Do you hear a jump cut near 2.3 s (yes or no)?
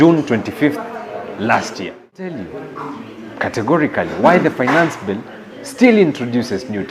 yes